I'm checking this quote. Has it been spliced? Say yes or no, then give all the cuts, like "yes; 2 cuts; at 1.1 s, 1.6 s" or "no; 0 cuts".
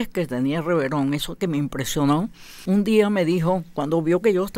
yes; 1 cut; at 2.6 s